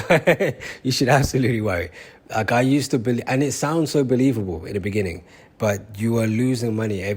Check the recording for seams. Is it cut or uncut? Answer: uncut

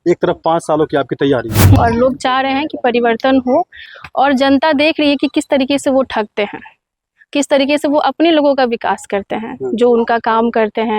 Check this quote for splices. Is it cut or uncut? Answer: cut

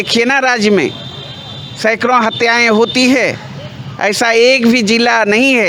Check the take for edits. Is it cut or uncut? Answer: uncut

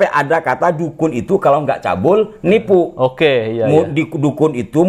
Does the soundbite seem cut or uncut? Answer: uncut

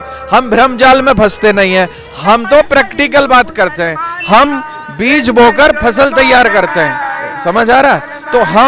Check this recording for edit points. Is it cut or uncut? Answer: uncut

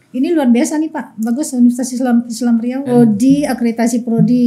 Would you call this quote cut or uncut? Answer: cut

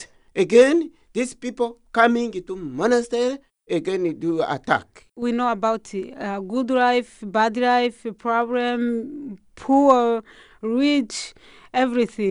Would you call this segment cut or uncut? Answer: cut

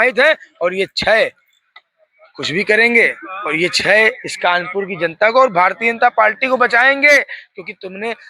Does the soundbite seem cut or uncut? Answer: uncut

